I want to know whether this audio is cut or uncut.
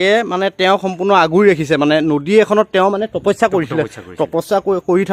uncut